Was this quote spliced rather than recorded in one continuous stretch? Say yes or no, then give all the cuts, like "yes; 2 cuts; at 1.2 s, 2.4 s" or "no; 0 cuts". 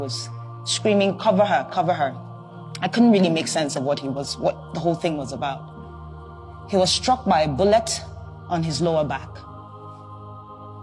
yes; 1 cut; at 9.6 s